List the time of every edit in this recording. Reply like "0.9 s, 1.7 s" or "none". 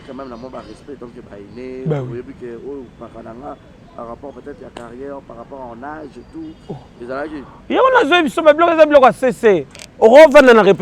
9.8 s